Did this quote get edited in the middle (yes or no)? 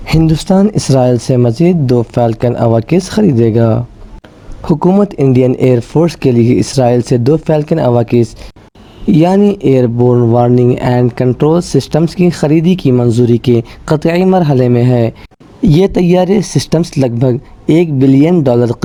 no